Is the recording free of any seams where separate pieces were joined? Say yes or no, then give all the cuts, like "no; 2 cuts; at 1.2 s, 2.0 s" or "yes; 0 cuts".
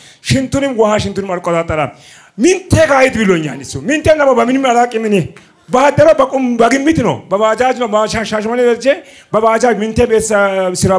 yes; 0 cuts